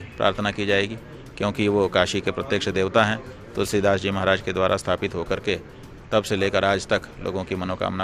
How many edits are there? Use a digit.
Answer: 0